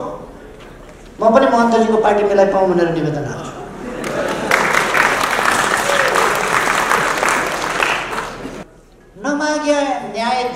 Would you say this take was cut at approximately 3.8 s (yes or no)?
no